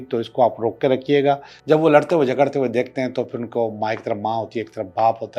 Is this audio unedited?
no; 1 cut; at 1.5 s

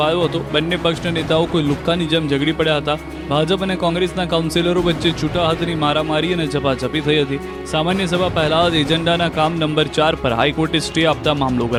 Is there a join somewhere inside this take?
no; 0 cuts

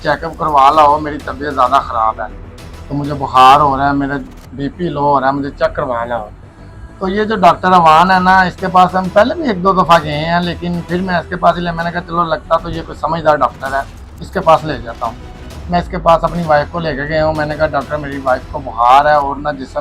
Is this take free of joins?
yes; 0 cuts

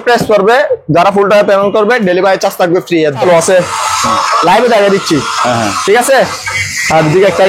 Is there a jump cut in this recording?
yes; 1 cut; at 3.2 s

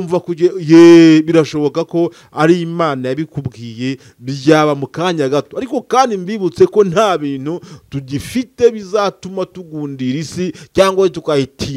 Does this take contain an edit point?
no; 0 cuts

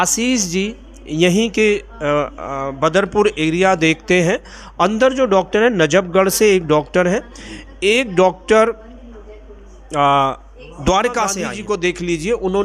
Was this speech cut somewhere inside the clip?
yes; 1 cut; at 11.5 s

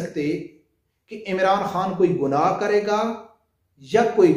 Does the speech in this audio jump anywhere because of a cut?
no; 0 cuts

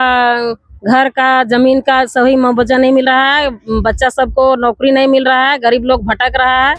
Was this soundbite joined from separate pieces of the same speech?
no; 0 cuts

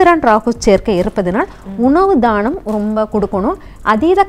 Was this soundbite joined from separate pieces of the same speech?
no; 0 cuts

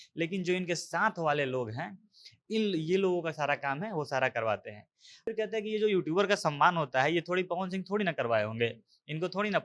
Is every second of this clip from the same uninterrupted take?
no; 1 cut; at 5.3 s

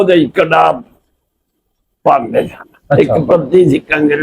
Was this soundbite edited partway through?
yes; 1 cut; at 3.0 s

